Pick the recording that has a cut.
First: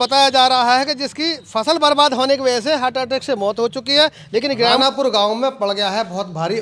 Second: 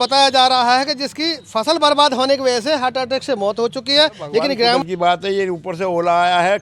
second; 1 cut; at 4.8 s

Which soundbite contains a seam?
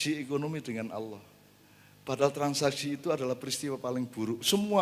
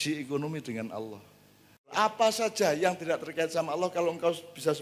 second; 1 cut; at 1.9 s

